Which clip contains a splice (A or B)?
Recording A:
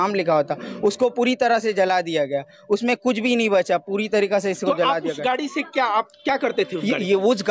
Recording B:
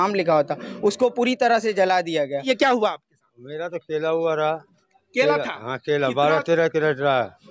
B